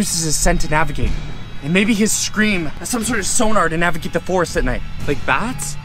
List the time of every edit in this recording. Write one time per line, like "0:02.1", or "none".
none